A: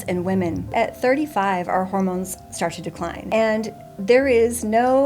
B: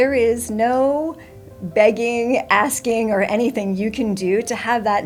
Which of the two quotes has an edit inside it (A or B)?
A